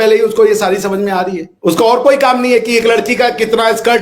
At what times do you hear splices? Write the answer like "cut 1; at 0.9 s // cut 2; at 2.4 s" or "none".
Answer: cut 1; at 1.5 s